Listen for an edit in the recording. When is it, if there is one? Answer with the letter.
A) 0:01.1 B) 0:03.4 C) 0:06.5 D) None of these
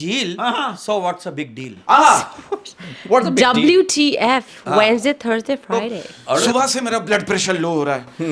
C